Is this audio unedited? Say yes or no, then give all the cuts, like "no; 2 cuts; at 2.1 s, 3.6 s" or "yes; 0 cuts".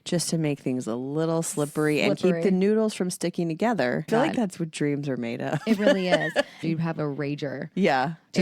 no; 2 cuts; at 4.1 s, 6.6 s